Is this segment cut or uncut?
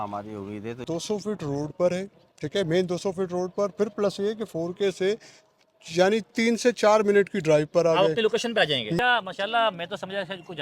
cut